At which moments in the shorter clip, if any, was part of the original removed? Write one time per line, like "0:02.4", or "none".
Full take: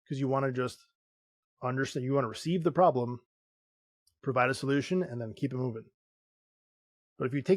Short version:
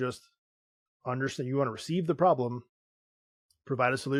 none